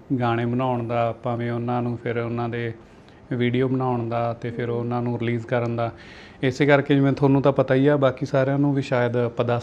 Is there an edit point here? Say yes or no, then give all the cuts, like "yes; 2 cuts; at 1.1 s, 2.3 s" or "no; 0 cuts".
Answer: no; 0 cuts